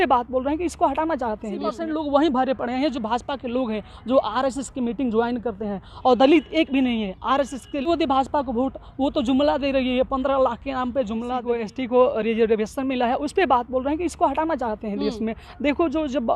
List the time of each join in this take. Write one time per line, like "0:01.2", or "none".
0:01.8
0:07.9
0:11.4